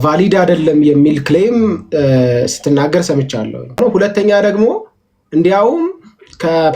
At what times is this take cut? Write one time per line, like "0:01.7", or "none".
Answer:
0:03.8

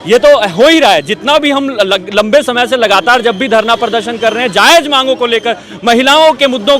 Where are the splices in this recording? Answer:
none

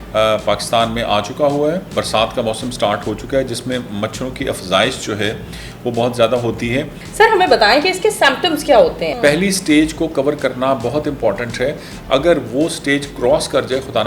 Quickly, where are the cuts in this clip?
0:01.9
0:07.0
0:09.1

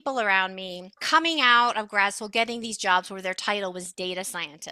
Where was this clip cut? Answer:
0:01.0

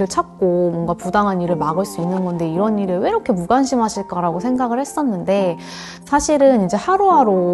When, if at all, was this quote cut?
none

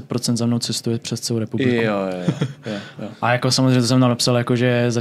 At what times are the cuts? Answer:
none

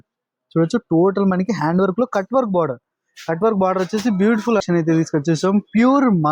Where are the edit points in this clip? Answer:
0:04.6

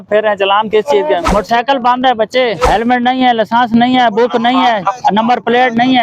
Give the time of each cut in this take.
0:01.3
0:02.7

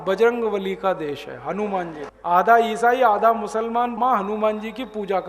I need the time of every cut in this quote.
0:02.0
0:04.0

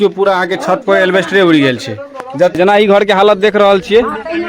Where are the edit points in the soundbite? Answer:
0:02.5

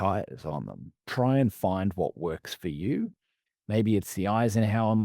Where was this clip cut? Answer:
0:01.0

